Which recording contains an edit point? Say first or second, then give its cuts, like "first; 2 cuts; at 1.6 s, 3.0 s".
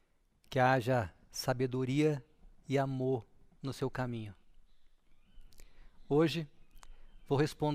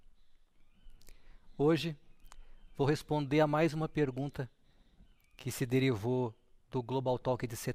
first; 1 cut; at 2.6 s